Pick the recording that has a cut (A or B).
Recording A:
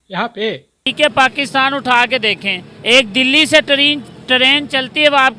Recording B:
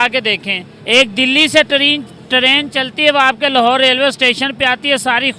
A